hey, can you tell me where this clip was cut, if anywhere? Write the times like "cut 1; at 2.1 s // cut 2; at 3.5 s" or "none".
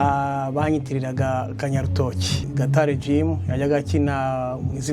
cut 1; at 2.5 s